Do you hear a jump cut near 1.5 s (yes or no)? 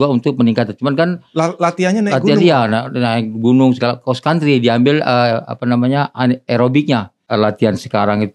no